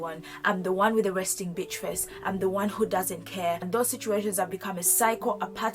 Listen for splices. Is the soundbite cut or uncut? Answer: cut